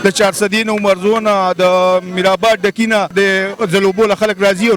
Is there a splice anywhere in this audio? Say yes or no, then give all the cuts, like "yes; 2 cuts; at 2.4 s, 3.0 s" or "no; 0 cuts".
yes; 1 cut; at 3.1 s